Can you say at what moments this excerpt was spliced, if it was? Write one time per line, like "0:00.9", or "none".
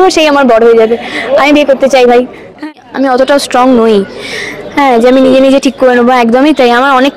0:02.7